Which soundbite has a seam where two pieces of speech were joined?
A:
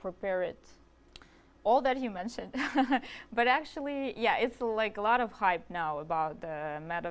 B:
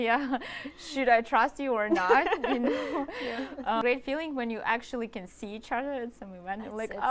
B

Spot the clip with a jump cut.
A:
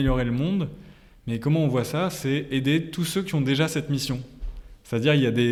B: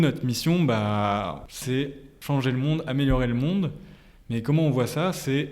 B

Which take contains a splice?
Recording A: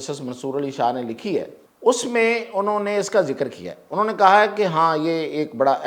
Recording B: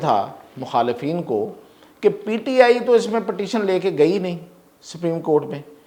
A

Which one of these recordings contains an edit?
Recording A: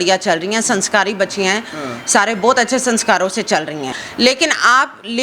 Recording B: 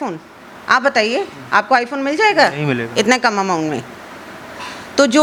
A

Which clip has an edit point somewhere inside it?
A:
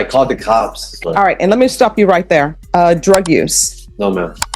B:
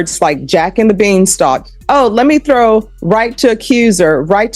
A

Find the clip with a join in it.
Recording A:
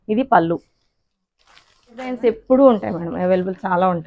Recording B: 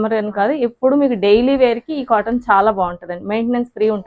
A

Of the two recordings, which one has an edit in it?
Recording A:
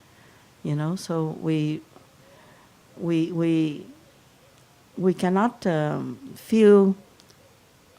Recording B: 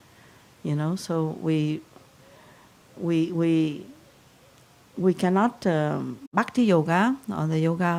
A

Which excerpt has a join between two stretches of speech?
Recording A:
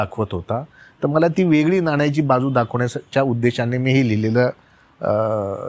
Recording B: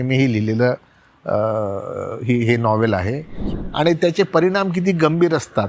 B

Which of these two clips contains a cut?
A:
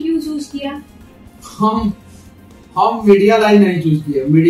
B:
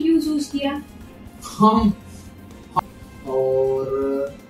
B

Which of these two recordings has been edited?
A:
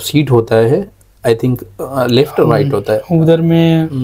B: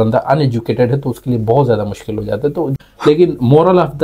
B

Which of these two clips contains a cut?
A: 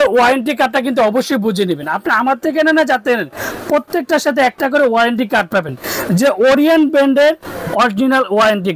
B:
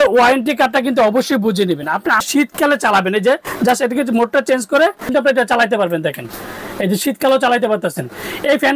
B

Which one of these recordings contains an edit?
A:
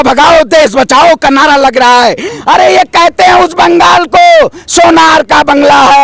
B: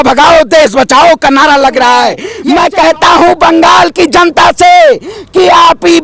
B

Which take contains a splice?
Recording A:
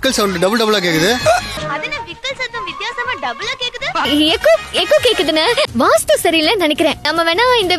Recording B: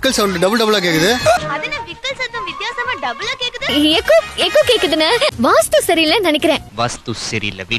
B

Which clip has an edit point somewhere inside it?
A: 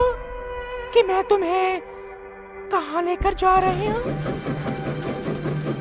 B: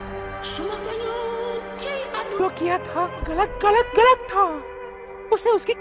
B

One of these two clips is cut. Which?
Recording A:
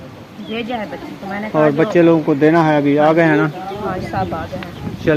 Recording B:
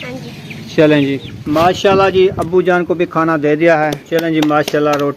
B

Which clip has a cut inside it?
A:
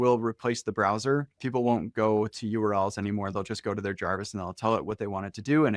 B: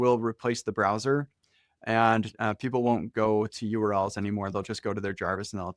A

